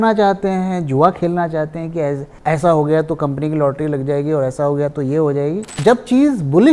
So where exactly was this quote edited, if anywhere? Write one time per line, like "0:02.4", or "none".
0:02.3
0:05.7

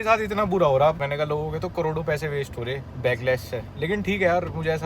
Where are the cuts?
0:01.0
0:02.9

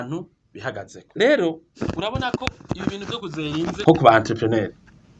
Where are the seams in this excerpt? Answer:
0:01.0
0:01.7
0:03.8

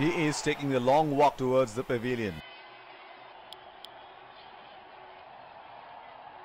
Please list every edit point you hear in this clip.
0:02.4

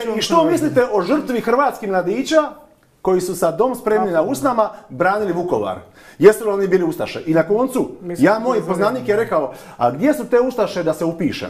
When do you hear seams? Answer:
none

